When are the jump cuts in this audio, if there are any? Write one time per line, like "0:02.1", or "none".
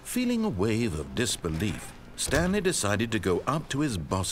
none